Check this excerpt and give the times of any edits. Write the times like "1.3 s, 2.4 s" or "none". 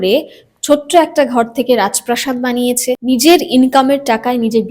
3.0 s